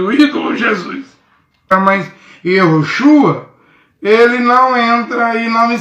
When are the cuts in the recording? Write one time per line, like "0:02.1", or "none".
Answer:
0:01.7